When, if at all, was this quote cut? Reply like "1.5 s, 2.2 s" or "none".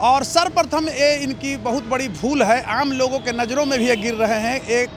none